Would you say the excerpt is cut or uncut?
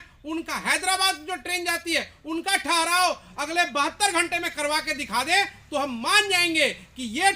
uncut